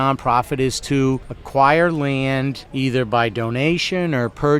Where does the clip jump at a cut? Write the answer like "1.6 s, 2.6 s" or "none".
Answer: 1.3 s, 2.6 s